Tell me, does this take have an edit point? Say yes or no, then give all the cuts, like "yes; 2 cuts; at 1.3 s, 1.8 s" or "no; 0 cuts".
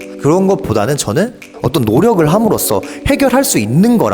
yes; 1 cut; at 1.6 s